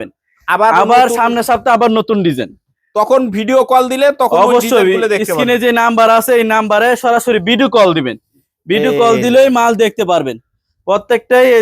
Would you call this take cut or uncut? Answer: uncut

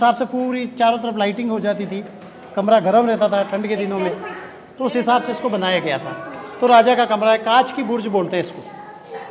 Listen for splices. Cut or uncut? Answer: uncut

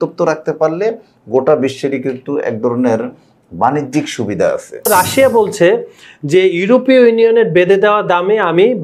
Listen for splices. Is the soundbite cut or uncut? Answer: cut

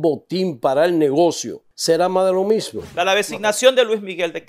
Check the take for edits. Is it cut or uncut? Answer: cut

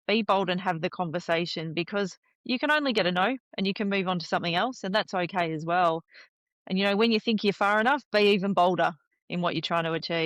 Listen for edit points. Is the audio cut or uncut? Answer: cut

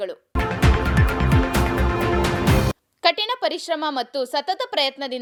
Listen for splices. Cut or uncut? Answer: uncut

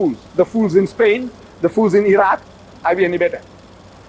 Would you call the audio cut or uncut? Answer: cut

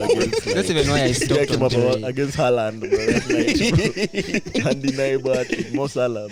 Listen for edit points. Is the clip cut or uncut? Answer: uncut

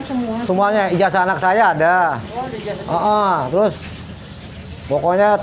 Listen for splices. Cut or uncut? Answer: uncut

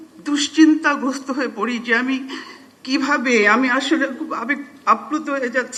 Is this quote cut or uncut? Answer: uncut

